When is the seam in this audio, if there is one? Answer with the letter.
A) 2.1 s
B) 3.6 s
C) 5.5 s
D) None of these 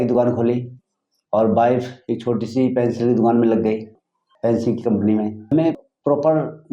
C